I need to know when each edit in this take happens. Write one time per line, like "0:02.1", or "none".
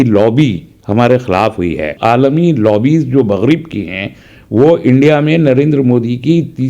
0:01.9